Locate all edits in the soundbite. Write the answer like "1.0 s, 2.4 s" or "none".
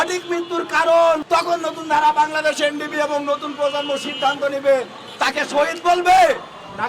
1.2 s